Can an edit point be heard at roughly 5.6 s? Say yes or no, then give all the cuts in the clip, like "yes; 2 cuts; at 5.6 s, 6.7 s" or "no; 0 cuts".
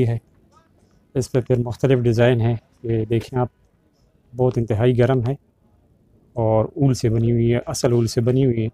no; 0 cuts